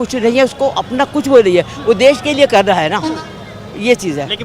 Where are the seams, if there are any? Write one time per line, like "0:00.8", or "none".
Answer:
none